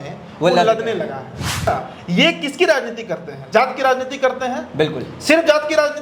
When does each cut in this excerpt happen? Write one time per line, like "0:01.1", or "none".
0:01.7